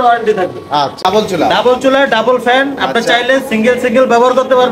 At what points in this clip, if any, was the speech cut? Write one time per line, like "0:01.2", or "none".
0:01.0